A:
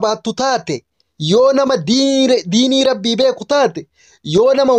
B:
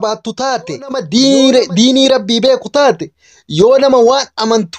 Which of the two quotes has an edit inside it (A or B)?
B